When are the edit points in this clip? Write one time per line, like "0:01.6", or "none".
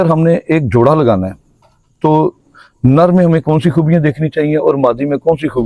none